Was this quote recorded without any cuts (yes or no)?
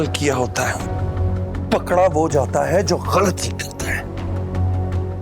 yes